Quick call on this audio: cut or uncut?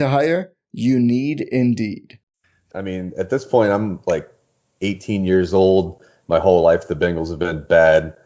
cut